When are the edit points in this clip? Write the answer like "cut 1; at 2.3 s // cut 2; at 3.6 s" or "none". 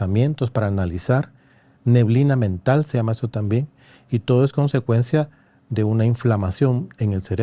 none

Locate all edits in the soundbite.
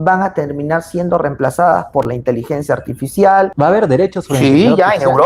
cut 1; at 3.5 s

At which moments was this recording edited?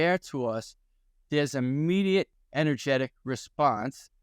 cut 1; at 2.4 s

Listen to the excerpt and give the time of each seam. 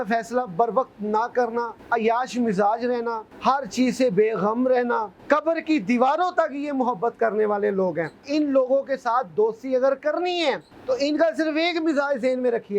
cut 1; at 1.8 s // cut 2; at 3.3 s // cut 3; at 5.1 s // cut 4; at 8.2 s // cut 5; at 10.7 s

